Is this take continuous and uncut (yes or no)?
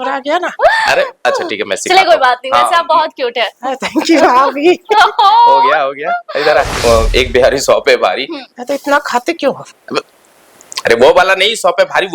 no